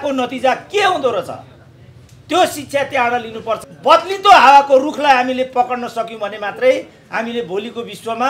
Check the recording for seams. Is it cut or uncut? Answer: cut